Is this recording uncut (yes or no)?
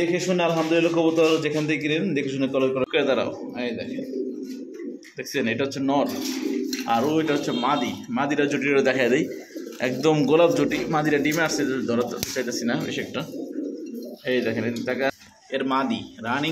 no